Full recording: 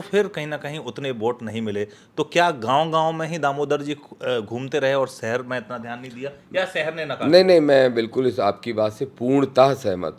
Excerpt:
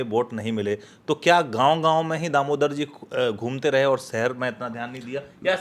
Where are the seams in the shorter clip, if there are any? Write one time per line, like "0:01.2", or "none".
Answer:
none